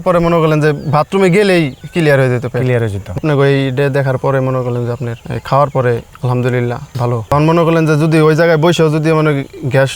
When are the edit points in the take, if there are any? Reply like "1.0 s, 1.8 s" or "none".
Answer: 3.2 s, 7.3 s